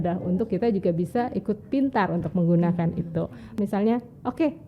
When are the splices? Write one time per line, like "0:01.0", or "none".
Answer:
0:03.6